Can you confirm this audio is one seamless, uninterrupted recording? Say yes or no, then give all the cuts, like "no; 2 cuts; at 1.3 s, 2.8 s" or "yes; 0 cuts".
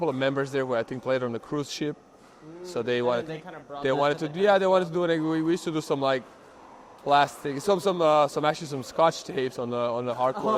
yes; 0 cuts